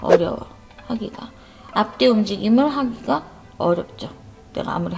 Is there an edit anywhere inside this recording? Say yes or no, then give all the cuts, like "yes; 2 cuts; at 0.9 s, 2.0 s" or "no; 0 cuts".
no; 0 cuts